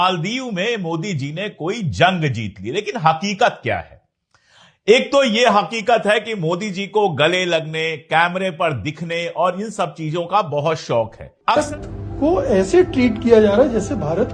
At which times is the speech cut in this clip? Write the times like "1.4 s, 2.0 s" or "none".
11.5 s